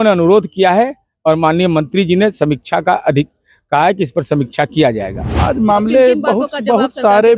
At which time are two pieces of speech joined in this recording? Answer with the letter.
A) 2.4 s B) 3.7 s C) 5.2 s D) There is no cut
C